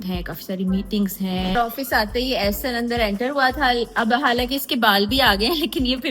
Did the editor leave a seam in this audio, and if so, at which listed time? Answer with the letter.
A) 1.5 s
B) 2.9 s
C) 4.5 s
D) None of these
A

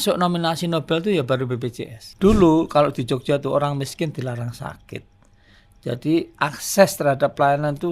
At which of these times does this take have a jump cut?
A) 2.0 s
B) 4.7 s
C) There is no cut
A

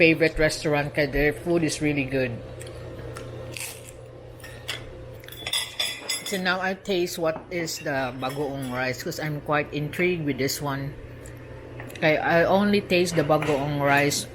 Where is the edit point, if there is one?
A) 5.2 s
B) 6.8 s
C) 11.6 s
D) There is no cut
A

